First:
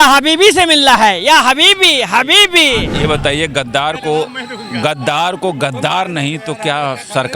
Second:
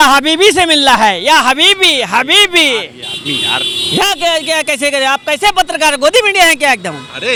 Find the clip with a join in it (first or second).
first